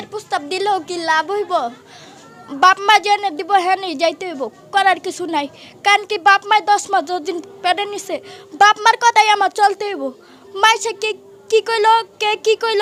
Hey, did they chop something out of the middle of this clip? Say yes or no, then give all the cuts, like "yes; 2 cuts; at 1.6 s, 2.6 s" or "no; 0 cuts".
no; 0 cuts